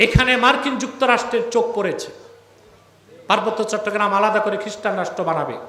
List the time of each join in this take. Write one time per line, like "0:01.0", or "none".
none